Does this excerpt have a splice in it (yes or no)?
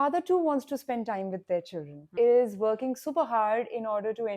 yes